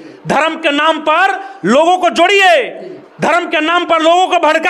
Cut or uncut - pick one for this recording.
uncut